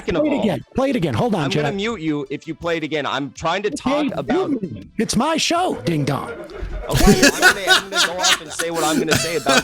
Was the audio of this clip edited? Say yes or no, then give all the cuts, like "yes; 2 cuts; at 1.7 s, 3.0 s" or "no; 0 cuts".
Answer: no; 0 cuts